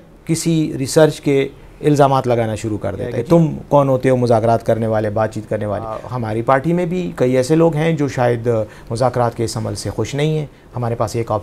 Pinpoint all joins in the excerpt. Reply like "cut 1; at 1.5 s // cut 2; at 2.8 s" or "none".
cut 1; at 3.2 s // cut 2; at 6.0 s // cut 3; at 10.5 s

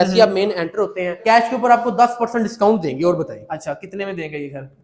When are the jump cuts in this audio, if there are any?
cut 1; at 1.2 s

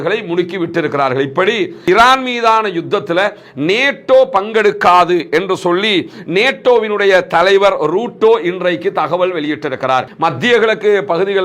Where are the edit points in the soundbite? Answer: cut 1; at 1.8 s // cut 2; at 10.1 s

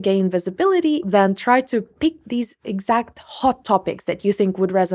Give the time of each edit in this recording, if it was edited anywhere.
cut 1; at 1.0 s

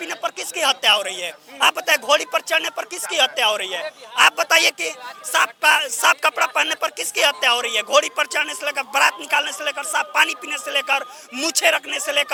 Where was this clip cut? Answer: none

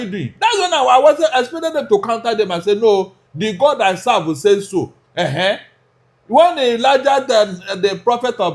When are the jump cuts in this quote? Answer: none

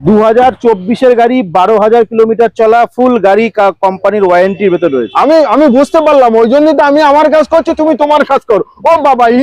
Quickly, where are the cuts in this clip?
none

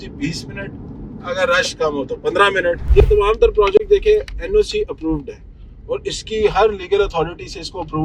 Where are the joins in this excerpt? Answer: cut 1; at 2.8 s

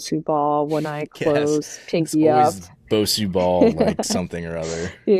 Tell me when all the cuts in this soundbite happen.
none

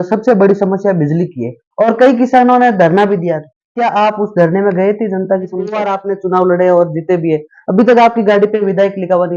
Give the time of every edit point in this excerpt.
cut 1; at 5.8 s

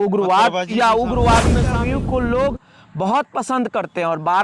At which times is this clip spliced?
cut 1; at 1.7 s

